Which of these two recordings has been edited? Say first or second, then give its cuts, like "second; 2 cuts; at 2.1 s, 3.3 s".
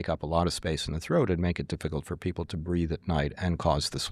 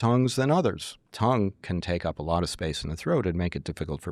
second; 1 cut; at 1.0 s